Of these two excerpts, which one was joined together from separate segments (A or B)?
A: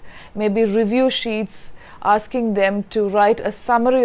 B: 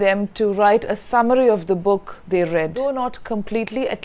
B